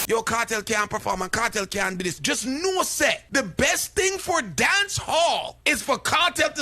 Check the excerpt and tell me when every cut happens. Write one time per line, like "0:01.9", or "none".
0:02.2
0:03.2
0:05.5